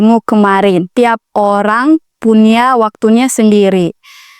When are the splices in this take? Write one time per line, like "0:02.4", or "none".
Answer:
0:00.9